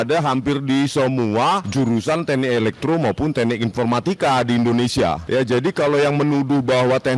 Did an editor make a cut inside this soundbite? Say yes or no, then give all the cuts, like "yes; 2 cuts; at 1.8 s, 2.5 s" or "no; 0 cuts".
yes; 2 cuts; at 1.7 s, 5.2 s